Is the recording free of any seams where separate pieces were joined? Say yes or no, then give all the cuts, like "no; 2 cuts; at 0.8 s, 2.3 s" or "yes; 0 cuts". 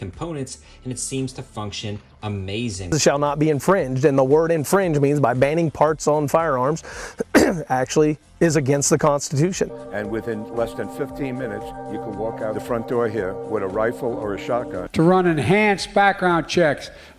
no; 3 cuts; at 2.9 s, 9.7 s, 14.8 s